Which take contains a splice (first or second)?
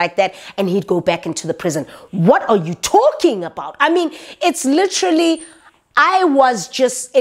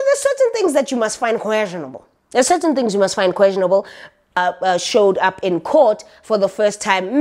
second